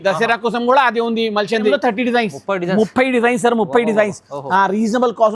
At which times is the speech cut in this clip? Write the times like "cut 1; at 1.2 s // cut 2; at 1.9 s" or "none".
cut 1; at 1.7 s